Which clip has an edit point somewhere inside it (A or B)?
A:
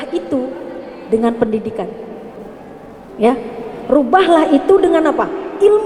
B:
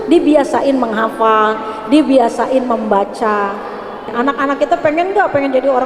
B